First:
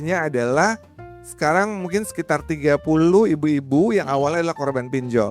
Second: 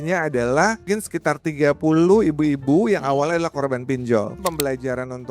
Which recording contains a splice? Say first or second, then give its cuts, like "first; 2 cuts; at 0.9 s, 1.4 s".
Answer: second; 2 cuts; at 0.8 s, 4.4 s